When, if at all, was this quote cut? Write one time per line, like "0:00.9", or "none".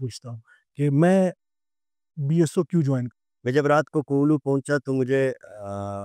0:03.1